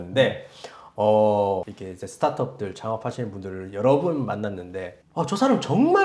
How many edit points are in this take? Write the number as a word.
one